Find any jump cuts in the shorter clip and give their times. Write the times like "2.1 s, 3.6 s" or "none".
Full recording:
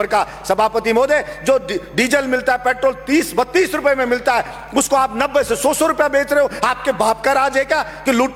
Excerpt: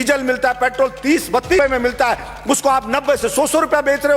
1.6 s